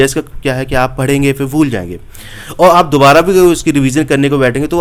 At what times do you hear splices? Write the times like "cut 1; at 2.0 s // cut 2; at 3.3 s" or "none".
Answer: none